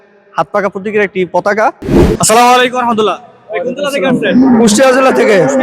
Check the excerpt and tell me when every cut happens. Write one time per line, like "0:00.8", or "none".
0:01.9